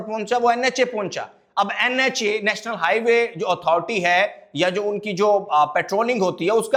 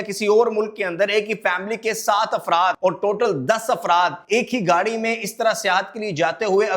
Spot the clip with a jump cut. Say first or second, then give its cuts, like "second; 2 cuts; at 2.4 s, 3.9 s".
second; 2 cuts; at 2.8 s, 4.2 s